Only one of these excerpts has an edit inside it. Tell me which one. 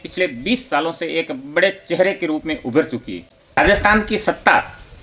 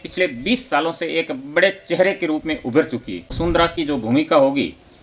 second; 1 cut; at 3.3 s

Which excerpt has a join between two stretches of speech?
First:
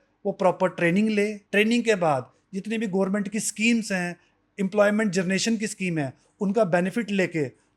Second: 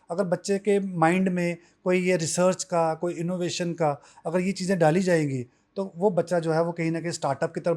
first; 1 cut; at 1.4 s

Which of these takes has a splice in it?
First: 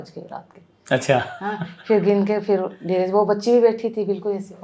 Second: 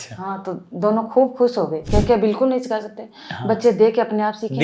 second; 1 cut; at 1.8 s

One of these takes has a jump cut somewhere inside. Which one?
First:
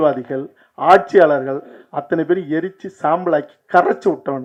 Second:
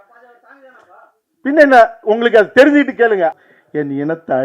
second; 1 cut; at 3.3 s

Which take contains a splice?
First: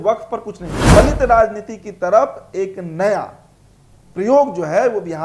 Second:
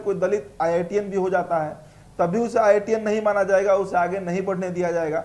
first; 1 cut; at 1.0 s

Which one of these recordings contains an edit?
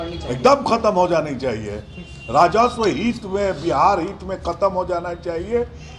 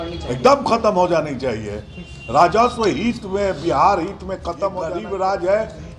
second; 1 cut; at 5.0 s

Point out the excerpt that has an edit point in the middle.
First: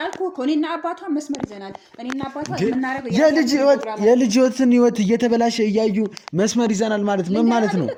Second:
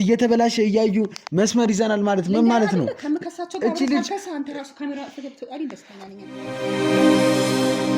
second; 1 cut; at 6.2 s

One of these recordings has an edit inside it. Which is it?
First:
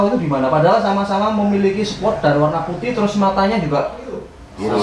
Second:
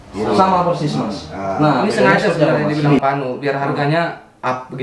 second; 1 cut; at 3.0 s

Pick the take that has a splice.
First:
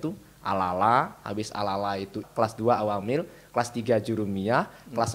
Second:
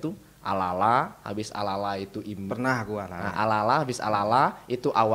first; 1 cut; at 2.3 s

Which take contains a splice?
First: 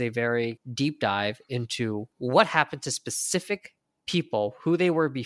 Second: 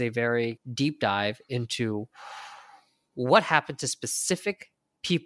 first; 1 cut; at 2.1 s

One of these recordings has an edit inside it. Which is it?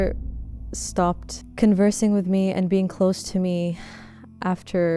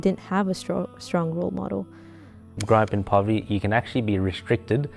second; 1 cut; at 2.6 s

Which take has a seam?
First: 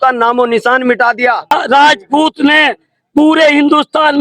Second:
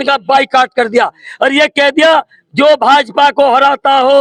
first; 1 cut; at 1.5 s

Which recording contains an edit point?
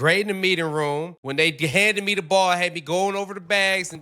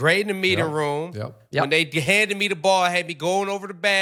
first; 1 cut; at 1.3 s

